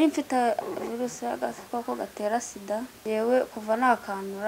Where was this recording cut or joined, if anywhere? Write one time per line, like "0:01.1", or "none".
0:02.9